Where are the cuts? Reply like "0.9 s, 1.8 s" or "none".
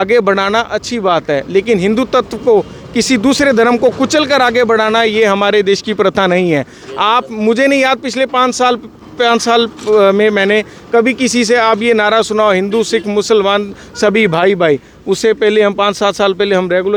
none